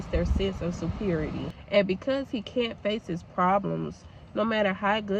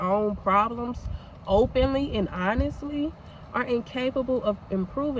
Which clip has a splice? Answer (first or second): first